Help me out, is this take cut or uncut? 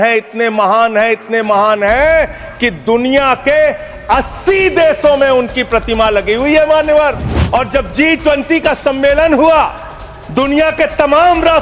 cut